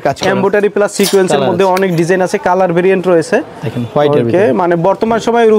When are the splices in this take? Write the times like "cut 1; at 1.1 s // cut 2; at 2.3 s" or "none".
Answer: none